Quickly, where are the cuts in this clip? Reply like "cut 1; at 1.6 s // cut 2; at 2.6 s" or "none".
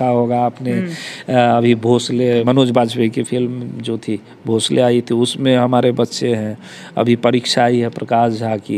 cut 1; at 2.4 s